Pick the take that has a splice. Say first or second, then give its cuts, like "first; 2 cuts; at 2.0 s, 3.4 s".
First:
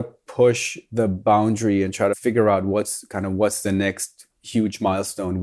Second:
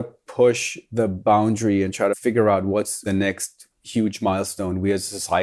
second; 1 cut; at 3.0 s